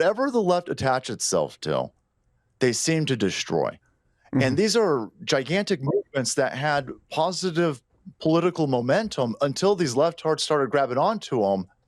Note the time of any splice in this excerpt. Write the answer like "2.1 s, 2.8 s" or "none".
none